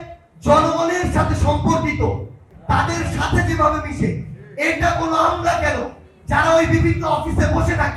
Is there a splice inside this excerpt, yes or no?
yes